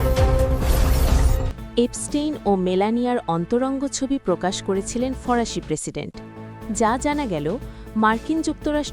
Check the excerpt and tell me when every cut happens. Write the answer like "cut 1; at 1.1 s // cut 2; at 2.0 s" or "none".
cut 1; at 1.4 s